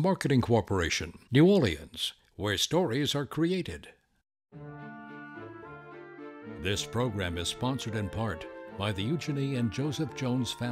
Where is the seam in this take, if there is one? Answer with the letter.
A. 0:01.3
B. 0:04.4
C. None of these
B